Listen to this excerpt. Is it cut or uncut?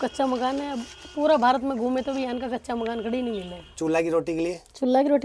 cut